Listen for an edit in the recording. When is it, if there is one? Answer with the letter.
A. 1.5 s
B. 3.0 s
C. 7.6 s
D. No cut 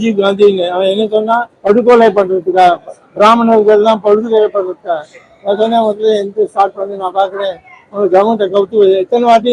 A